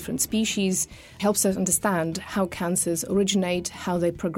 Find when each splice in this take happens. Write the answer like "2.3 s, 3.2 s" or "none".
1.2 s